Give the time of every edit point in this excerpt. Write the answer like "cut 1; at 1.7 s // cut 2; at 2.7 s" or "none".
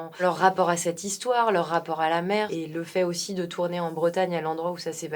cut 1; at 2.5 s